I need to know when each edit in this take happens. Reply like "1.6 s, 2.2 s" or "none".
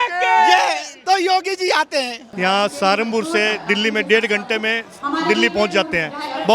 2.2 s